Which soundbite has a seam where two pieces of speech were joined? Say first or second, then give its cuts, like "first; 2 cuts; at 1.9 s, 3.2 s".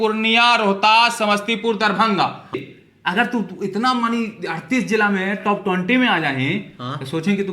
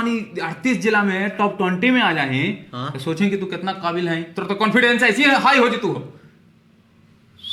first; 1 cut; at 2.7 s